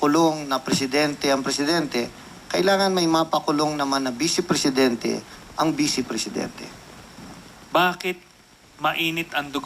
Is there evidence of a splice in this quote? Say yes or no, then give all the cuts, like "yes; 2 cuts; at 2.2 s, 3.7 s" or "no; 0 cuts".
yes; 1 cut; at 2.3 s